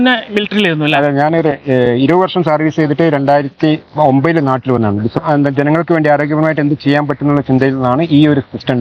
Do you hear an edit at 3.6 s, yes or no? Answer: no